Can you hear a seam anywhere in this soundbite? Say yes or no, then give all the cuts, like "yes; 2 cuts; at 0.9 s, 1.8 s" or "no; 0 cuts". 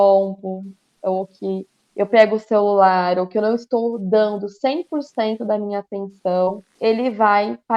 yes; 1 cut; at 6.7 s